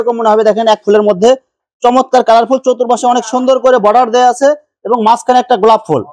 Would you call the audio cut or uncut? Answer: uncut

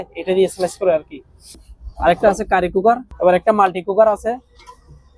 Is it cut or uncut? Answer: cut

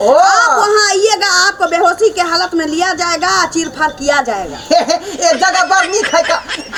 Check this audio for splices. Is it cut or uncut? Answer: uncut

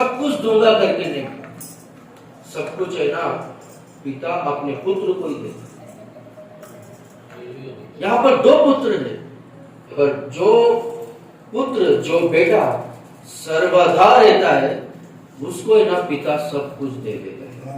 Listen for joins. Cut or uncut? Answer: cut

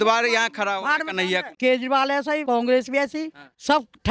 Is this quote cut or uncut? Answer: cut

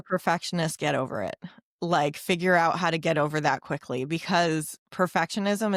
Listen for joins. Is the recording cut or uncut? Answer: uncut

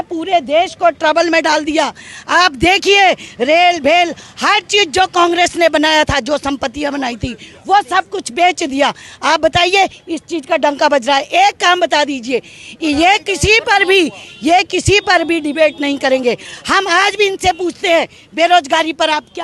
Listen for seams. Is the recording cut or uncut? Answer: uncut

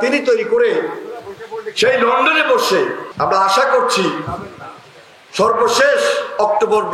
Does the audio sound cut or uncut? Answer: cut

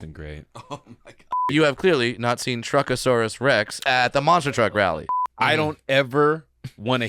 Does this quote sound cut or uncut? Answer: cut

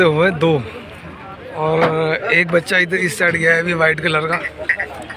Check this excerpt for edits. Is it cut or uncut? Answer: uncut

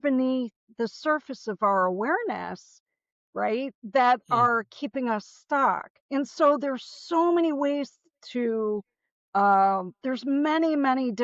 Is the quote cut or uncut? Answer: cut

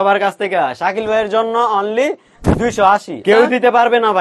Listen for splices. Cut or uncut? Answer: cut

